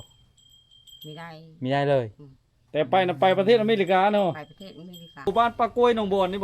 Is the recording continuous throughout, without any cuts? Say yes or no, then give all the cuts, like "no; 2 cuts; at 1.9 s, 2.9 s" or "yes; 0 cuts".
no; 1 cut; at 5.3 s